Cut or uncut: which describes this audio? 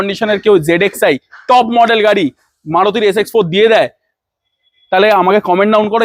uncut